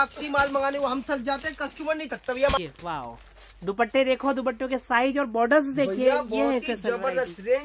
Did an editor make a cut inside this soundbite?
yes; 1 cut; at 2.6 s

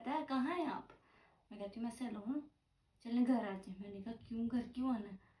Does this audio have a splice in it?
no; 0 cuts

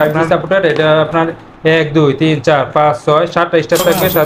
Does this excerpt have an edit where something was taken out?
no; 0 cuts

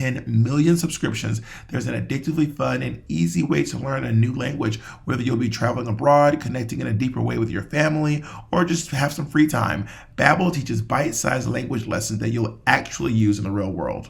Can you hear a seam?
no; 0 cuts

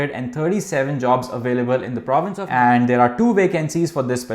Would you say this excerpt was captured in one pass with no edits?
no; 1 cut; at 2.4 s

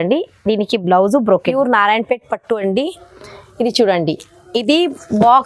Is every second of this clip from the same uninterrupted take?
no; 1 cut; at 1.5 s

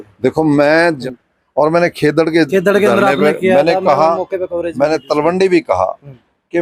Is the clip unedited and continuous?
no; 1 cut; at 1.0 s

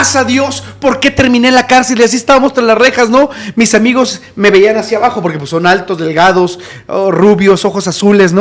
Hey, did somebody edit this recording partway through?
no; 0 cuts

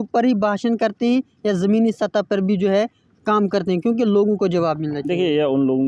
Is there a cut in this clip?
no; 0 cuts

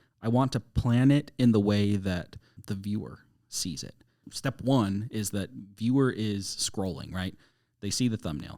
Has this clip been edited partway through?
yes; 1 cut; at 2.5 s

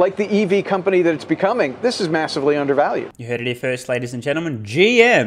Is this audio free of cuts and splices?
yes; 0 cuts

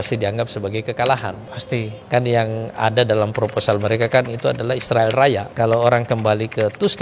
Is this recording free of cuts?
no; 2 cuts; at 1.9 s, 5.5 s

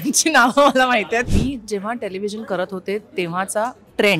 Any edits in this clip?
yes; 1 cut; at 1.3 s

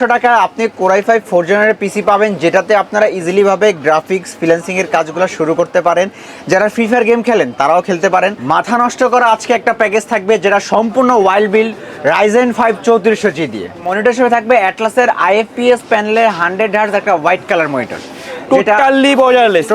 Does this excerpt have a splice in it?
yes; 2 cuts; at 8.4 s, 13.8 s

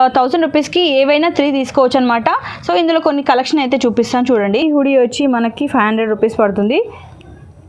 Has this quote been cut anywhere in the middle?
yes; 1 cut; at 4.6 s

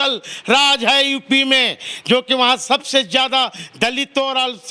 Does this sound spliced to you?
no; 0 cuts

